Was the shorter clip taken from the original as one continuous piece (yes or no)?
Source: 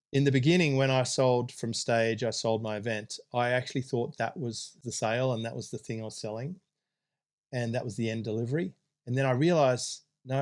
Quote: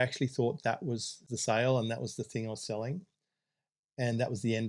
yes